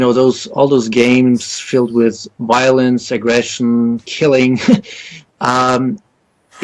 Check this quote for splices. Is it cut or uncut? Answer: cut